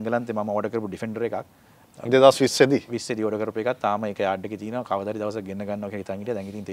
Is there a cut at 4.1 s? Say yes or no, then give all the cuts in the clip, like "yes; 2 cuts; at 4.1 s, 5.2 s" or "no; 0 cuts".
no; 0 cuts